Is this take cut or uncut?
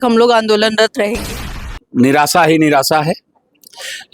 cut